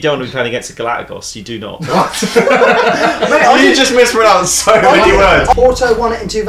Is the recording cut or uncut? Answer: cut